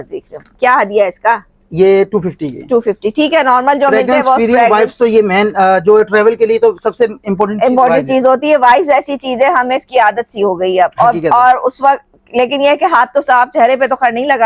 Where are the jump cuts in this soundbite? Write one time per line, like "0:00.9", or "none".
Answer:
none